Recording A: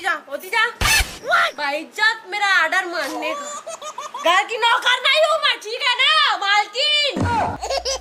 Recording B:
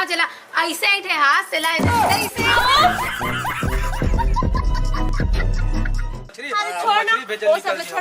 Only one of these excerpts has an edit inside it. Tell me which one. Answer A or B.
B